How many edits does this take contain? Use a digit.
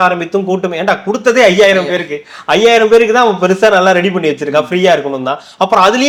0